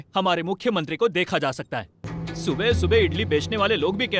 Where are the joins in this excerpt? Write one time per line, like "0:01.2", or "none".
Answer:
0:02.1